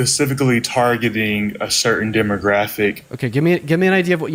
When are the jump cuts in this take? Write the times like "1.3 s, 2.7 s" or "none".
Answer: none